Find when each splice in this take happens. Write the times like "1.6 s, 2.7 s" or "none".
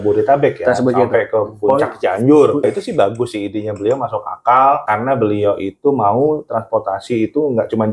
2.6 s, 4.8 s